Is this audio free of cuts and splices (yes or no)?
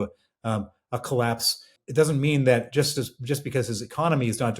no